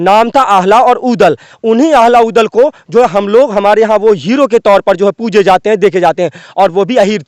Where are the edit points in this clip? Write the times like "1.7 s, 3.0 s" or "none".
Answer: none